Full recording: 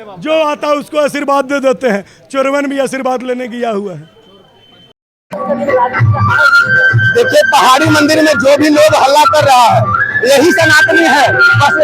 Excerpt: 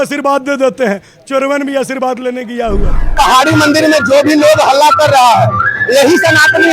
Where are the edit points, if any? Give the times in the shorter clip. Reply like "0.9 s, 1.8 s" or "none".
3.1 s